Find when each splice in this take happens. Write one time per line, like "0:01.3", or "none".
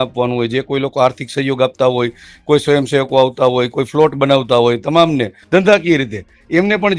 0:05.4